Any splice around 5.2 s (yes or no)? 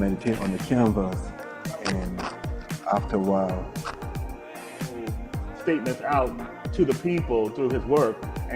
yes